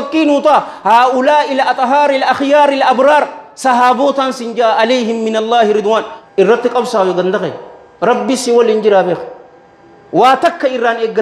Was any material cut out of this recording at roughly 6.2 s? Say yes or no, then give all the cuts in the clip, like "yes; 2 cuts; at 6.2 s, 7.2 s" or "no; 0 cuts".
yes; 1 cut; at 6.2 s